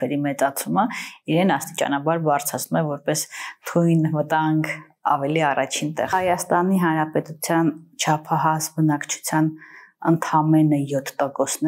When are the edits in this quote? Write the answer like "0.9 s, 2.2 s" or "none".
6.1 s